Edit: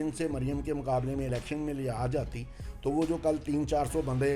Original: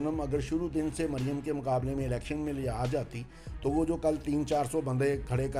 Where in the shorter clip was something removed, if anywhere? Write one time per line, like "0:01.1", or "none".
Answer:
none